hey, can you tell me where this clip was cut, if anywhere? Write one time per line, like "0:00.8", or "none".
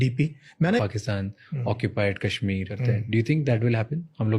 0:00.8
0:02.7